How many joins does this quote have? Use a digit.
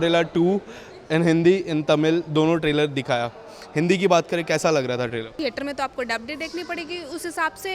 1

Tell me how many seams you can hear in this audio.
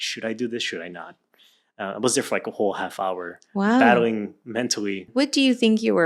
1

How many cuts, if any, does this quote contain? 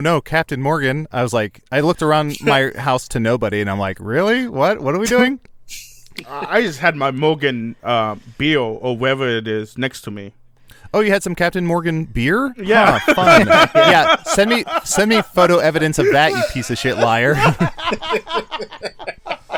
0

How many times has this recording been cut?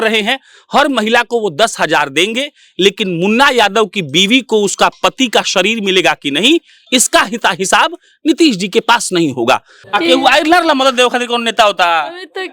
1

